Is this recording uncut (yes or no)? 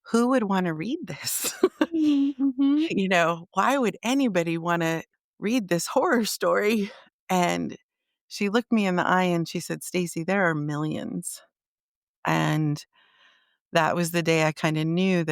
no